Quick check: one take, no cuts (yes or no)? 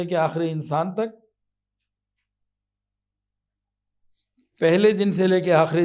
yes